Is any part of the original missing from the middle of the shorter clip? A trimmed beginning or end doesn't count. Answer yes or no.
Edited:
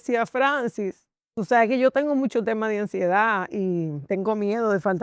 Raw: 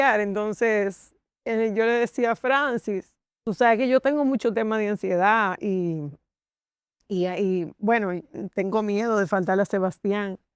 yes